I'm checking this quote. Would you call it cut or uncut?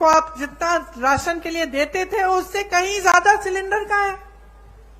uncut